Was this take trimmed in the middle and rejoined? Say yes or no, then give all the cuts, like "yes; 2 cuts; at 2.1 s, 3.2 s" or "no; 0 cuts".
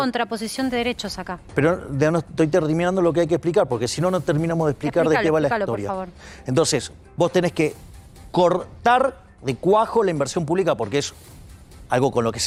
no; 0 cuts